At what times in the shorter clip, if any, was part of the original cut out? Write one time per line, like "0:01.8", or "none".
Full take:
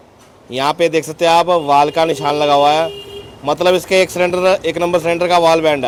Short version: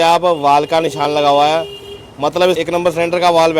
0:02.6